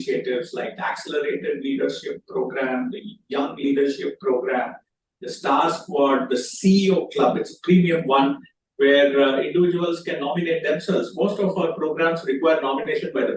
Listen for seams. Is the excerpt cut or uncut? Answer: uncut